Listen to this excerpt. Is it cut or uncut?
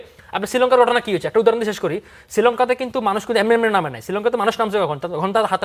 uncut